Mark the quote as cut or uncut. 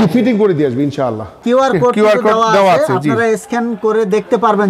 cut